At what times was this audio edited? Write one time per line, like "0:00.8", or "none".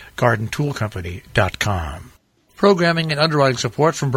0:02.2

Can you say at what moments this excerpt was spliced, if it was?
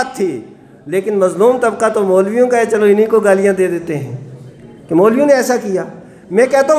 none

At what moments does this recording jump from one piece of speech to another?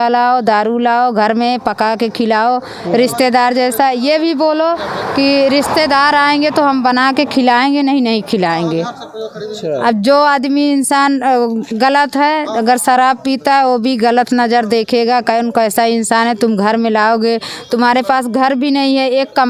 none

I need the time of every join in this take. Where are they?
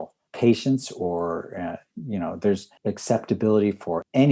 none

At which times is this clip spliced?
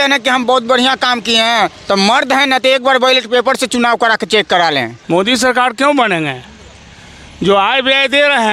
0:05.0

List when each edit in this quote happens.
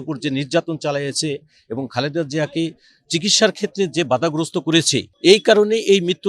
0:05.0

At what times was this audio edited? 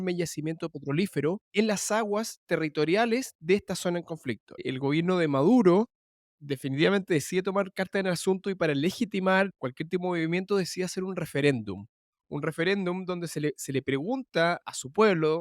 0:01.5
0:04.6
0:14.6

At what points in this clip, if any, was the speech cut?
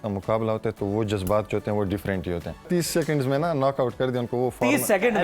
0:02.7

